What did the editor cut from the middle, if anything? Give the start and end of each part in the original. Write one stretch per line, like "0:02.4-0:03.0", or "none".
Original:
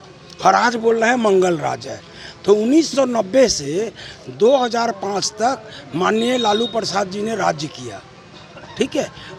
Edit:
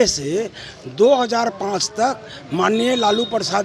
none

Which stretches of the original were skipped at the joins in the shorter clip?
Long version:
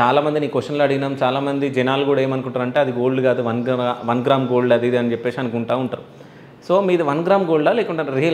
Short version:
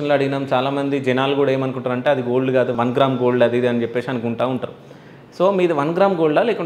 0:03.4-0:04.0

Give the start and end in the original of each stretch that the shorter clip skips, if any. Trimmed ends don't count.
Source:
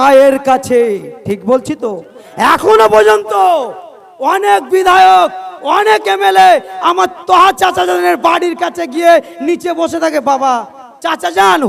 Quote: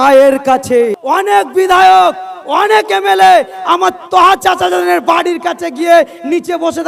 0:01.0-0:04.1

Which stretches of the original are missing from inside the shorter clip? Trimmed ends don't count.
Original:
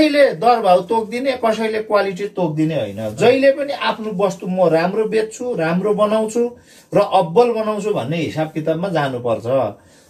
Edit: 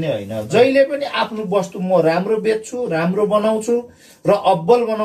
none

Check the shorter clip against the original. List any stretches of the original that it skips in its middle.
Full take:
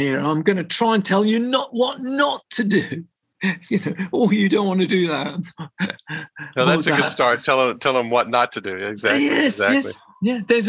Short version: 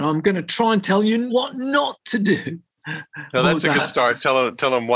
0:01.5-0:01.7
0:03.3-0:06.0

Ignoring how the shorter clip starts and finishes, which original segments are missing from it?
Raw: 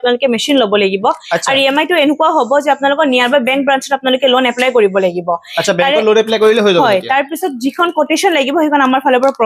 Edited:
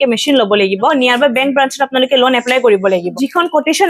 0:01.1-0:03.0
0:05.2-0:07.5

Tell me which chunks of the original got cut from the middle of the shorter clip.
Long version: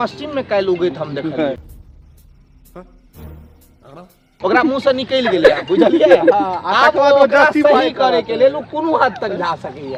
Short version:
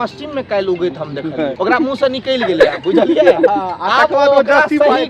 0:01.5-0:04.4

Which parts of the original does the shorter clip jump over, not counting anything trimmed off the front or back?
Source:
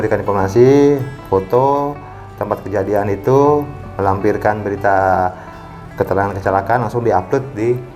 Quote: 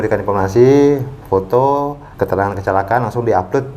0:02.0-0:05.8

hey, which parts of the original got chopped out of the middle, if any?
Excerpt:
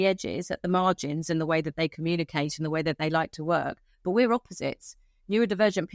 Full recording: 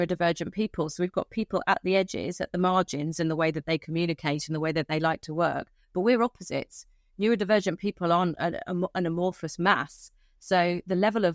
none

